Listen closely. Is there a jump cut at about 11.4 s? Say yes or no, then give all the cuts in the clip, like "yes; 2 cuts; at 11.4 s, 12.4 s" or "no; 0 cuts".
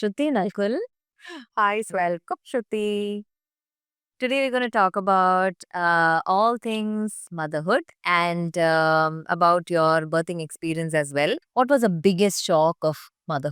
yes; 1 cut; at 11.4 s